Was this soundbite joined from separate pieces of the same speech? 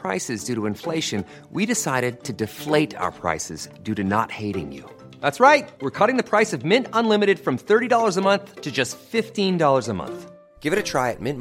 no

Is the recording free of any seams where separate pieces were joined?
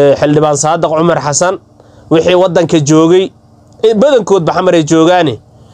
yes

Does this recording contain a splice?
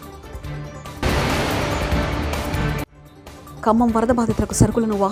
no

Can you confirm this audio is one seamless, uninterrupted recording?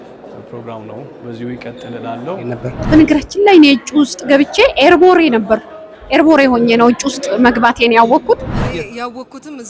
no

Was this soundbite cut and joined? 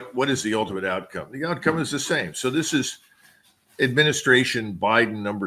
no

